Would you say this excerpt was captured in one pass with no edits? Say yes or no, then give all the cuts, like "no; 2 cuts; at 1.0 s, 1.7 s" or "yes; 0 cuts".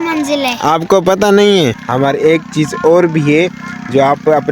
no; 1 cut; at 1.8 s